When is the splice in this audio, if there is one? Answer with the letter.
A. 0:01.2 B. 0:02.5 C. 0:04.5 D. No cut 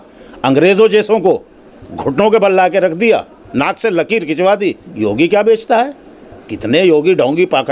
D